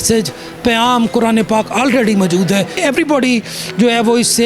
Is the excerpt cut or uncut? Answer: cut